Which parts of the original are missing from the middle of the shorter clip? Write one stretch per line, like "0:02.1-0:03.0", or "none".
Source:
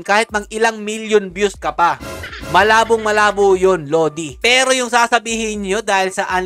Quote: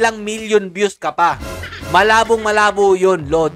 none